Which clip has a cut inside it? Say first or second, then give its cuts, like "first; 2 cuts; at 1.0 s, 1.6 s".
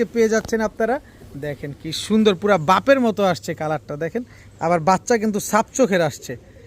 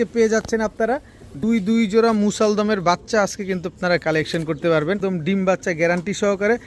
second; 2 cuts; at 1.4 s, 5.0 s